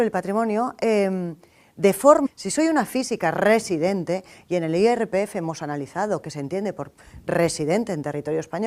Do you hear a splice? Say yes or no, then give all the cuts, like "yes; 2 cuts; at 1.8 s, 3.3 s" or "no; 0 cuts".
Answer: no; 0 cuts